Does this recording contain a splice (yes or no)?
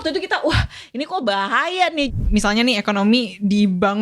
yes